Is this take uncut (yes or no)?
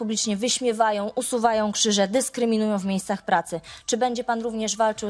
yes